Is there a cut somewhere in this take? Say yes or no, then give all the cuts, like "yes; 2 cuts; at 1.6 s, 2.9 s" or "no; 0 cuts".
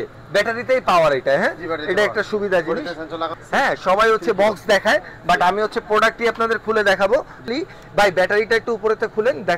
yes; 2 cuts; at 3.3 s, 7.5 s